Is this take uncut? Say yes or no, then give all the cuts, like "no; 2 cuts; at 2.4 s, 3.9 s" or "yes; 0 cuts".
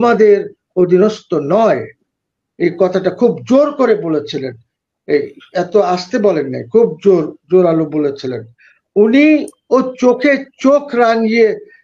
yes; 0 cuts